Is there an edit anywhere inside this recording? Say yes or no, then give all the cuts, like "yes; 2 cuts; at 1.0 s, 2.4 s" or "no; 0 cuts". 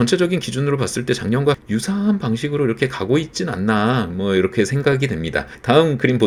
no; 0 cuts